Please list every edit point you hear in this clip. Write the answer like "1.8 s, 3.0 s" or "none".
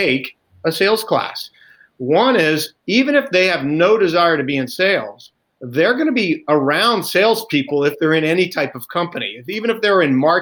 none